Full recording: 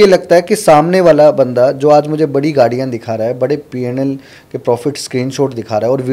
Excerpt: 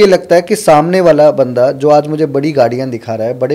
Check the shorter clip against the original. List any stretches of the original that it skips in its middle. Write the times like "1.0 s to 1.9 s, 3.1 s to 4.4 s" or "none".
none